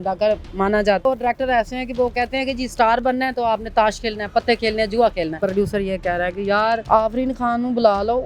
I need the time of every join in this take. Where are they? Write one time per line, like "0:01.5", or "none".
0:01.0
0:05.3
0:06.8

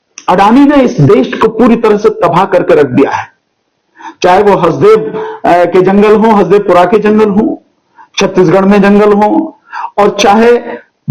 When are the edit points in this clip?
none

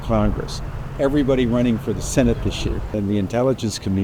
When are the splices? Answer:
0:02.9

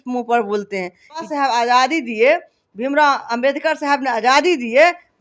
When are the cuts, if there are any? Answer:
0:01.3

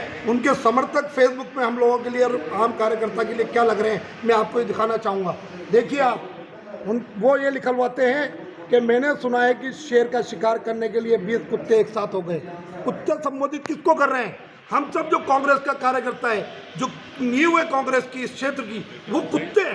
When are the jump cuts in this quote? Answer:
none

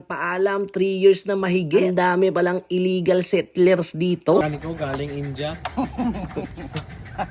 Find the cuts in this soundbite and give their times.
0:04.4

